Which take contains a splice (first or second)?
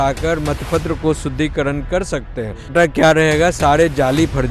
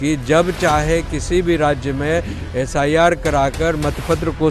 first